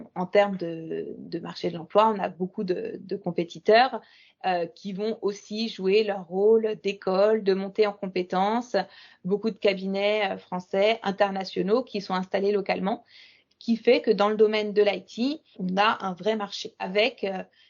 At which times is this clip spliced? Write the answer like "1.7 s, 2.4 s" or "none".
15.6 s, 16.9 s